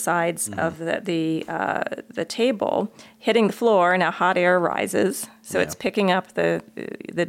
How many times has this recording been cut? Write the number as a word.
zero